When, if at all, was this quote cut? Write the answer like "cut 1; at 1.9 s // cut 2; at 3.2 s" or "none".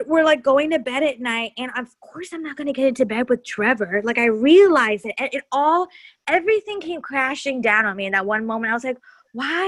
none